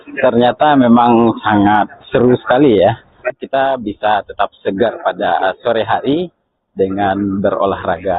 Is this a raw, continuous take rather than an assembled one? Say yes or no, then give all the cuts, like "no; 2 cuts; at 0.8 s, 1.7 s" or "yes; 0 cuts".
yes; 0 cuts